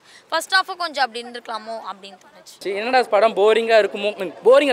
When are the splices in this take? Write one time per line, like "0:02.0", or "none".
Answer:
0:02.6

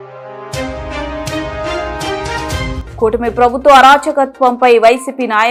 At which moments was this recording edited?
none

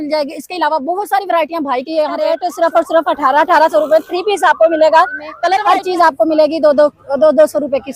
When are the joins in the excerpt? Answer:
0:02.4
0:05.6

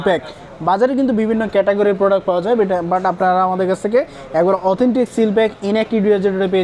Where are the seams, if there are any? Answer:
none

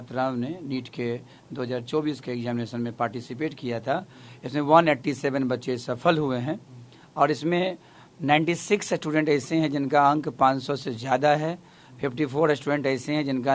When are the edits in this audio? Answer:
none

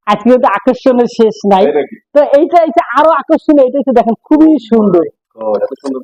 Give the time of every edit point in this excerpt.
none

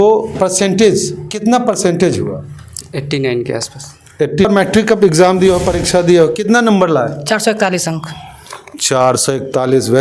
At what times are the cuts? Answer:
0:04.5

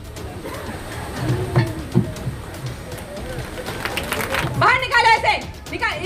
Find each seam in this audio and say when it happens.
0:04.4

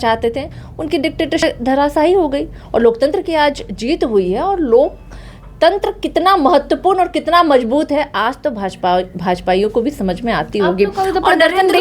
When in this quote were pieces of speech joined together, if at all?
0:01.4

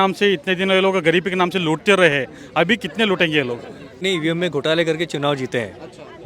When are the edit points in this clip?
0:04.0

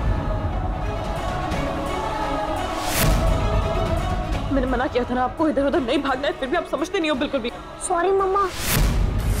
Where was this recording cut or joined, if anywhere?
0:01.0

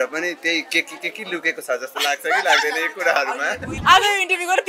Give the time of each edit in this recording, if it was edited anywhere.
0:03.7

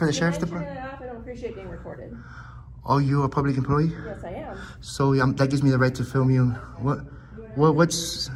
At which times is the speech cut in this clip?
none

